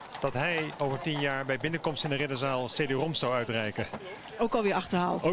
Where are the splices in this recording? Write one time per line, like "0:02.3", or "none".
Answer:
0:02.5